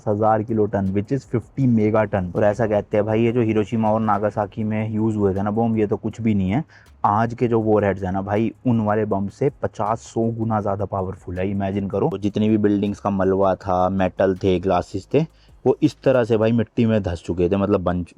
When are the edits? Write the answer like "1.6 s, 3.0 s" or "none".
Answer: 2.3 s, 12.2 s